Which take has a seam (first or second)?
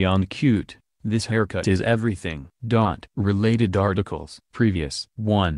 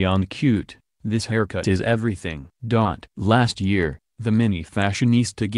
second